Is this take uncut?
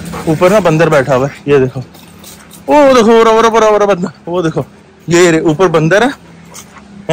yes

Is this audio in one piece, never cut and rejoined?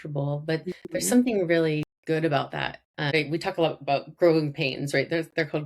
no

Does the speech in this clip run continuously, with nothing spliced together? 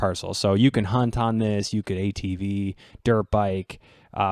yes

